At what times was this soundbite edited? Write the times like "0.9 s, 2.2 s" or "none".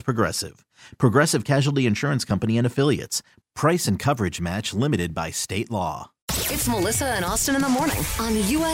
6.3 s